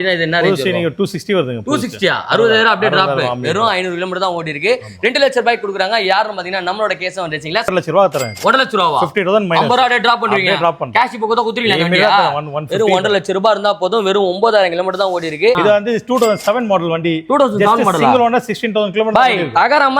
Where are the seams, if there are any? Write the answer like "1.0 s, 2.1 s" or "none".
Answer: 7.7 s, 15.6 s